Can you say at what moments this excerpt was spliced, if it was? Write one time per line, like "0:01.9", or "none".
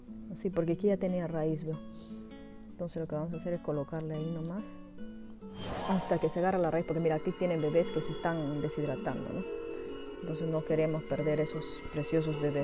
none